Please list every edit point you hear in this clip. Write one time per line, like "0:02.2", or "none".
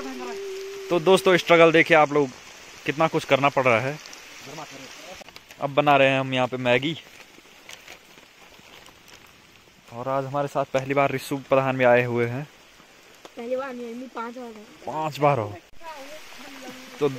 none